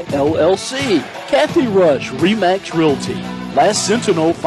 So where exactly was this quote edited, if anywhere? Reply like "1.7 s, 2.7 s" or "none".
1.1 s